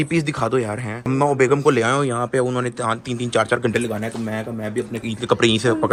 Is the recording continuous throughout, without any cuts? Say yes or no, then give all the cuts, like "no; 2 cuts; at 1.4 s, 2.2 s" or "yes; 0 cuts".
yes; 0 cuts